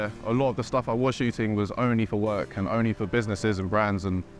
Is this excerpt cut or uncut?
uncut